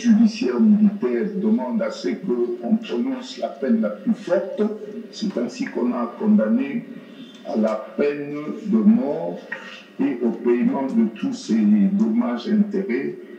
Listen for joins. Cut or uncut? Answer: uncut